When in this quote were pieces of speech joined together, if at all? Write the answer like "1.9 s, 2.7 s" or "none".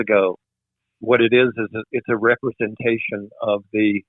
1.0 s